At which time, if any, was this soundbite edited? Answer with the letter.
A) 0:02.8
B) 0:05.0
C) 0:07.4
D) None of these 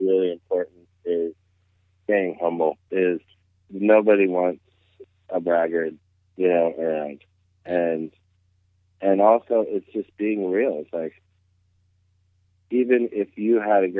A